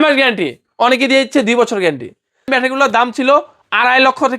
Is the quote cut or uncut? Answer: cut